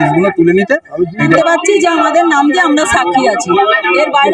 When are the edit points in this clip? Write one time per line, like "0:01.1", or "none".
0:01.3